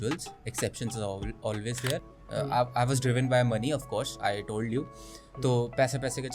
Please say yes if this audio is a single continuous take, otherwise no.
no